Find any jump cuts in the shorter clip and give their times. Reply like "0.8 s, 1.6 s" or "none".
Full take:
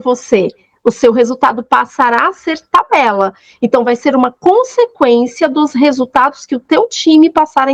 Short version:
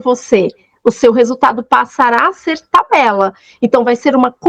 none